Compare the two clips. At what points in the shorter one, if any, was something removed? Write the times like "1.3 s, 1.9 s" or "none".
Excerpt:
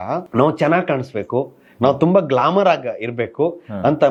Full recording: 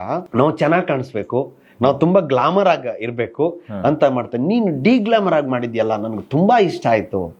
none